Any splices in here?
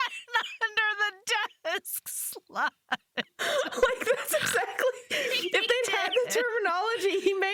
no; 0 cuts

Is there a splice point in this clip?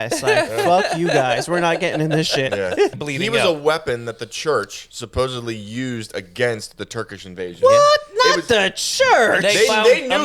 yes; 1 cut; at 2.9 s

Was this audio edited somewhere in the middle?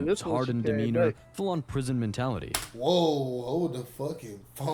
no; 0 cuts

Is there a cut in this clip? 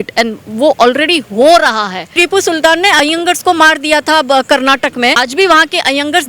yes; 3 cuts; at 2.0 s, 3.0 s, 5.2 s

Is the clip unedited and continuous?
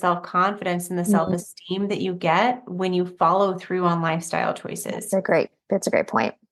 yes; 0 cuts

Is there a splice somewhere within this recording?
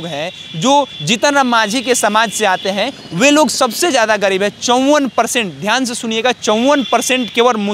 no; 0 cuts

